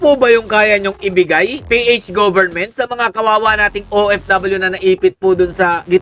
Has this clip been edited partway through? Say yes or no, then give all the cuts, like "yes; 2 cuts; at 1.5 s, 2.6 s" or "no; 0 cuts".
no; 0 cuts